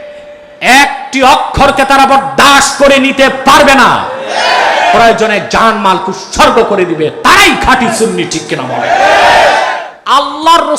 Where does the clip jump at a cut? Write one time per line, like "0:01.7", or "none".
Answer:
0:09.9